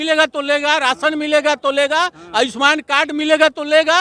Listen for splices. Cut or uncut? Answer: uncut